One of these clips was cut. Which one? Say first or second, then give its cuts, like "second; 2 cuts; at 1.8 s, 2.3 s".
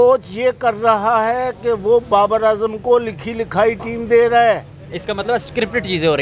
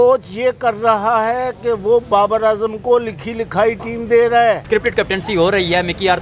second; 1 cut; at 4.6 s